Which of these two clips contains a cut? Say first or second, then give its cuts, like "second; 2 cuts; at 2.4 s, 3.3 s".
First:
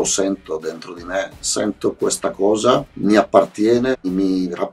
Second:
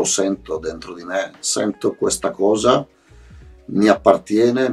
first; 2 cuts; at 2.9 s, 4.0 s